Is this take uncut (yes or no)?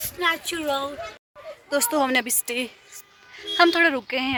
yes